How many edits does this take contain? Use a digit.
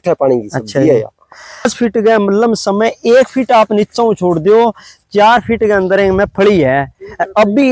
1